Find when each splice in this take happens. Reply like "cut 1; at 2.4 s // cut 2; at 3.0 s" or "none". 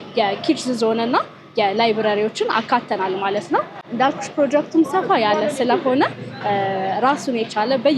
none